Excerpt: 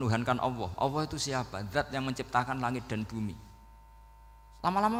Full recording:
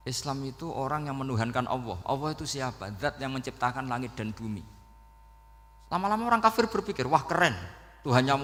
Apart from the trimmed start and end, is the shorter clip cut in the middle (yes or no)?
no